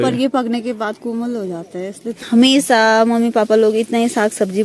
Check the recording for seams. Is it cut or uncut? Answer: cut